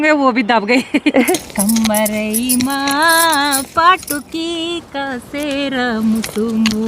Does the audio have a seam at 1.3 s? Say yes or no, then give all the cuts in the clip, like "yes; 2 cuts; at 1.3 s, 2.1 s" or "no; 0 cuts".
yes; 1 cut; at 1.3 s